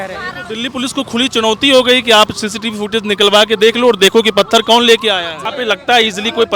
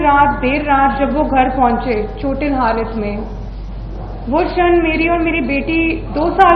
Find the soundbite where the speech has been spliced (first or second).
first